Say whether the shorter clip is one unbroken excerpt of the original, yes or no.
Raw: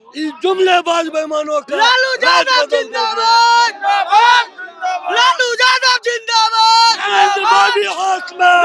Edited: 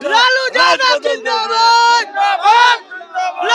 yes